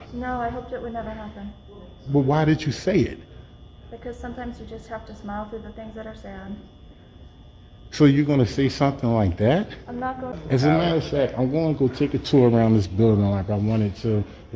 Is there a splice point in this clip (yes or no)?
yes